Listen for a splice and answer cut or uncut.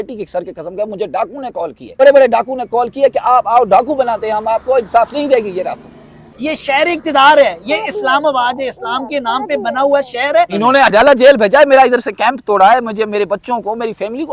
cut